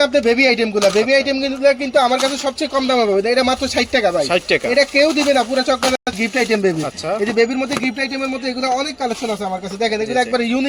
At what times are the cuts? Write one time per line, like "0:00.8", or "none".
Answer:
none